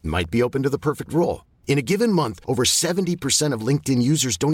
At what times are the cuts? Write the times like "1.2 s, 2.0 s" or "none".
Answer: none